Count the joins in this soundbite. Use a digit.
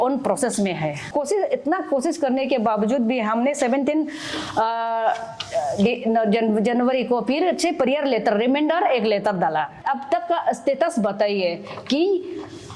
2